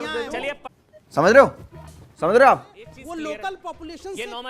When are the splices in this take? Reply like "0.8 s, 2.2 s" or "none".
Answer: 2.9 s